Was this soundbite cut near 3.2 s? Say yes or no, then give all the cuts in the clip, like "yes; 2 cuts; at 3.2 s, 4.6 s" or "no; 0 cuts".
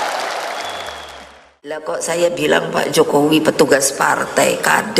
no; 1 cut; at 1.8 s